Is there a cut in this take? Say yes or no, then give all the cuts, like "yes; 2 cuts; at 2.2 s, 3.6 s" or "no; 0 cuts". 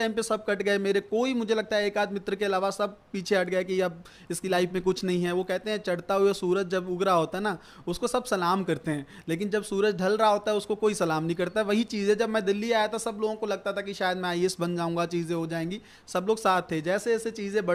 no; 0 cuts